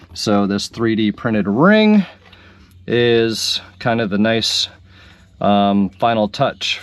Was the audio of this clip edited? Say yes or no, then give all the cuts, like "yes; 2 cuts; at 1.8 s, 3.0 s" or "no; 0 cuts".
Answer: no; 0 cuts